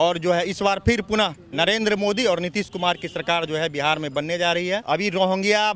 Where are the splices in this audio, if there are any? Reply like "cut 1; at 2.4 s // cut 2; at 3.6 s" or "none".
cut 1; at 4.8 s